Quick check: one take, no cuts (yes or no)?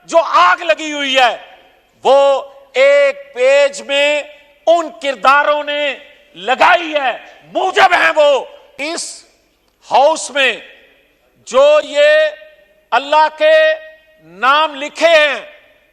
yes